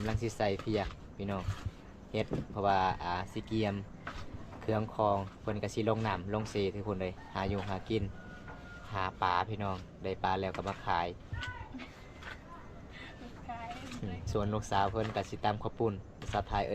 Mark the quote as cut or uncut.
uncut